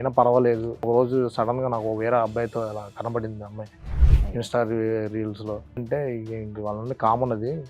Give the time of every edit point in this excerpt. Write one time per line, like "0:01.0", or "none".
0:00.9
0:05.8